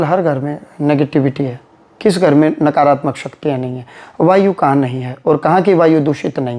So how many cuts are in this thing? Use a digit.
0